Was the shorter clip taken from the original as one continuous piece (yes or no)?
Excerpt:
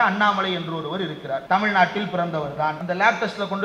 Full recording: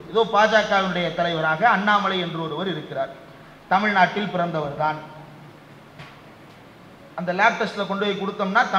no